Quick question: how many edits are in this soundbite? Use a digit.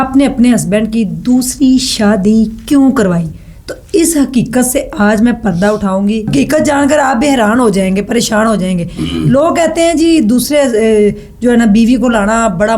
1